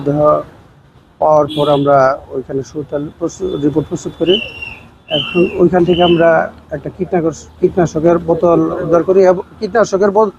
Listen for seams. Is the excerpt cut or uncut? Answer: uncut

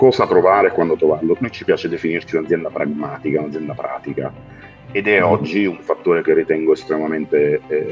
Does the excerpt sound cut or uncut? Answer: uncut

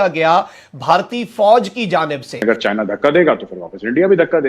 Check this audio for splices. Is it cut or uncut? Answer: cut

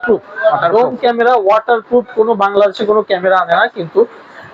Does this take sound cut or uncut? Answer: uncut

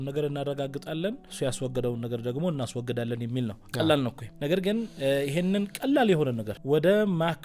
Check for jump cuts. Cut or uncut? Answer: cut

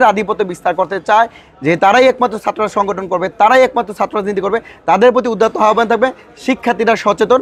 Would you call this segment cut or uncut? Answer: uncut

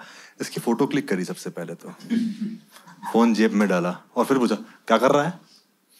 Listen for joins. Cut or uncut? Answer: uncut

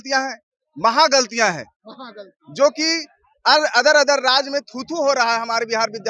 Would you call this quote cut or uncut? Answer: uncut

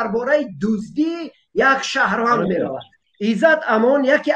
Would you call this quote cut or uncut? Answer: cut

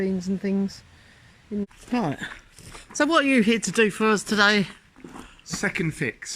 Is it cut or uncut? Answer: cut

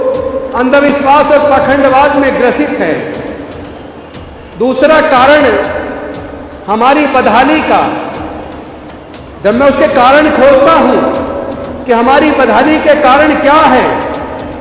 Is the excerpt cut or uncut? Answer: uncut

